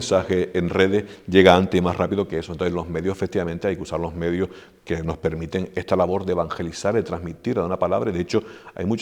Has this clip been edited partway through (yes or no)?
no